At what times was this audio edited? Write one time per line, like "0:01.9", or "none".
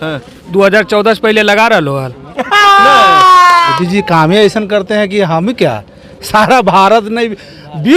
0:03.8